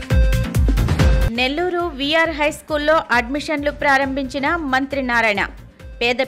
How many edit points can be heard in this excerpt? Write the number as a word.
one